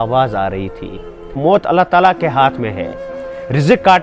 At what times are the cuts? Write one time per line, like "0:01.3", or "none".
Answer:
0:01.4